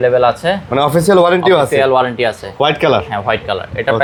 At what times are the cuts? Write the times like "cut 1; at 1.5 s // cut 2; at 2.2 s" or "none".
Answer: none

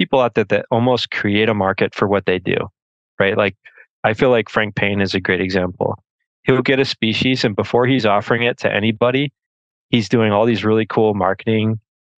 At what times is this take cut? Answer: none

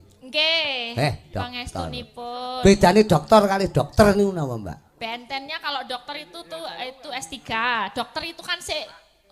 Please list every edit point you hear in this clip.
none

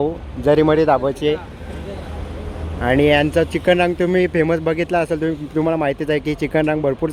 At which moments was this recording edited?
none

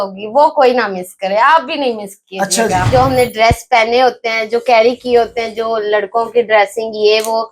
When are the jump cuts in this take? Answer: cut 1; at 2.8 s

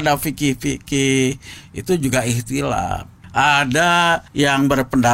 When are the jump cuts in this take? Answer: cut 1; at 3.1 s // cut 2; at 4.3 s

